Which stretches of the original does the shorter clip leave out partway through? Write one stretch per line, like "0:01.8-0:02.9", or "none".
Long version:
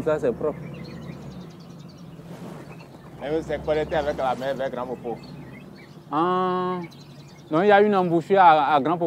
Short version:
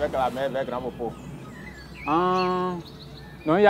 none